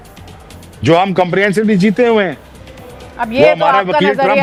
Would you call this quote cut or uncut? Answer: uncut